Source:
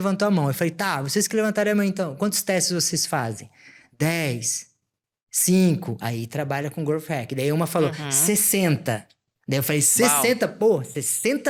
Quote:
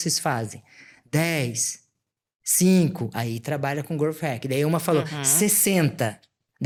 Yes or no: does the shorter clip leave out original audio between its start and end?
no